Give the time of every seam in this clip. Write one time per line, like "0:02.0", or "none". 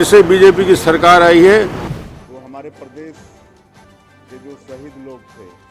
0:01.8